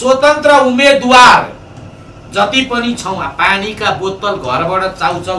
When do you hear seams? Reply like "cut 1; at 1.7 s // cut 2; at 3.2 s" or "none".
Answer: none